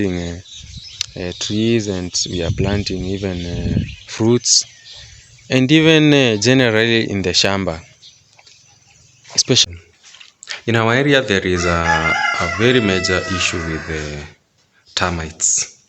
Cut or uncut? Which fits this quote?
cut